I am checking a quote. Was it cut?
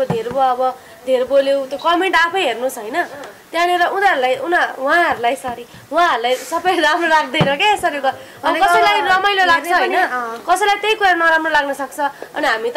no; 0 cuts

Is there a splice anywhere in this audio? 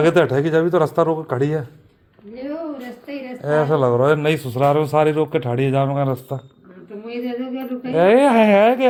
no; 0 cuts

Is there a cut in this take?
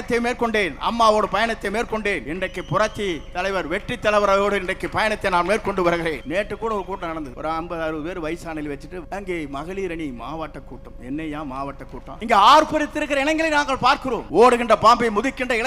yes; 6 cuts; at 2.3 s, 6.2 s, 7.3 s, 9.0 s, 12.1 s, 14.2 s

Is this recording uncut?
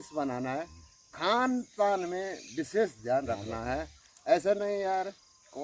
yes; 0 cuts

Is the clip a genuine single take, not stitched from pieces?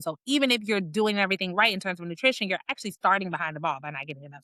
yes; 0 cuts

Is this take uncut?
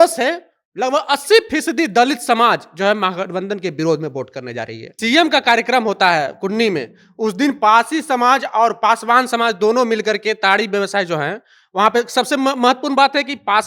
no; 1 cut; at 4.9 s

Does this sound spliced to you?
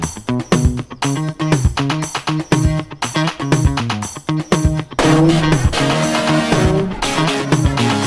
no; 0 cuts

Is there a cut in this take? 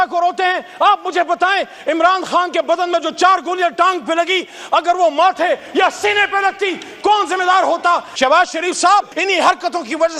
yes; 2 cuts; at 8.1 s, 9.1 s

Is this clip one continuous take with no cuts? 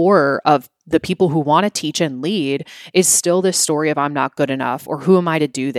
yes; 0 cuts

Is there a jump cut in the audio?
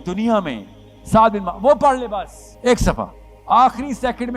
yes; 2 cuts; at 2.4 s, 3.3 s

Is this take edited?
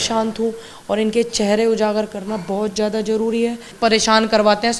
yes; 1 cut; at 3.6 s

